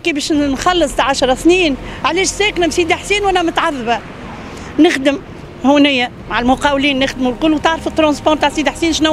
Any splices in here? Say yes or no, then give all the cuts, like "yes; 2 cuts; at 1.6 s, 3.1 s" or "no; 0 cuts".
no; 0 cuts